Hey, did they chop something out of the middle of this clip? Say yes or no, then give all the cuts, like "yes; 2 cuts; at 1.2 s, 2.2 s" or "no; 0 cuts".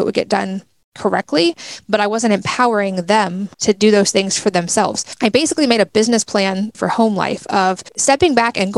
yes; 4 cuts; at 3.5 s, 5.0 s, 6.8 s, 7.9 s